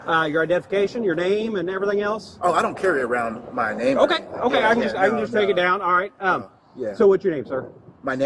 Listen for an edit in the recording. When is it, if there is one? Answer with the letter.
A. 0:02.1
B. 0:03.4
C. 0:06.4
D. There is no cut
D